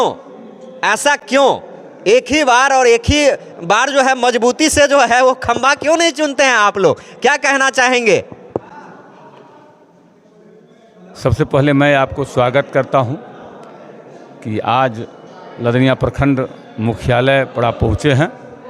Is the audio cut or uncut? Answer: uncut